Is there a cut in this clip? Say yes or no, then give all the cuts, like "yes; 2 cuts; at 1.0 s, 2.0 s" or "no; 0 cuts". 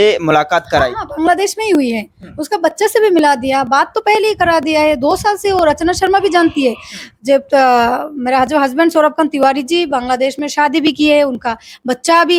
no; 0 cuts